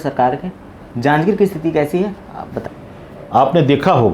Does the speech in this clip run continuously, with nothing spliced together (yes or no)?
no